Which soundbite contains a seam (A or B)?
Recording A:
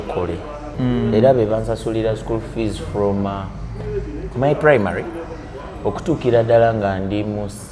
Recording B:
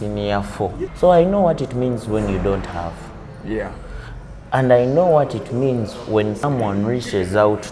B